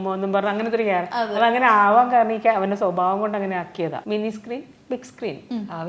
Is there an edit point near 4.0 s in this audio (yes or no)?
yes